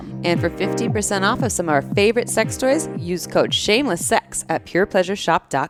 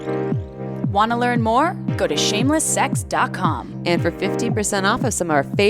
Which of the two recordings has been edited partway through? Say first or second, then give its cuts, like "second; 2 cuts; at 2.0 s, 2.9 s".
second; 1 cut; at 0.9 s